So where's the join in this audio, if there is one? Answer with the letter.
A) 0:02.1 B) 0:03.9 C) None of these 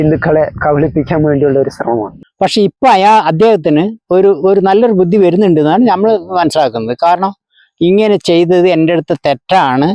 A